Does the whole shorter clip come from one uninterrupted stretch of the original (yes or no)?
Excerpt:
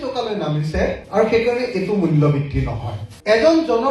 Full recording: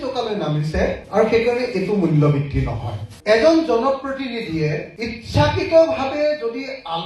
yes